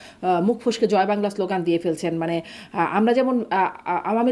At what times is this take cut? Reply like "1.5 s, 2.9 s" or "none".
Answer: none